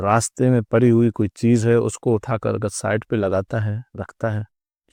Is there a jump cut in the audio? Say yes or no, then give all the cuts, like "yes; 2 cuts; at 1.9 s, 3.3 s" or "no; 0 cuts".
no; 0 cuts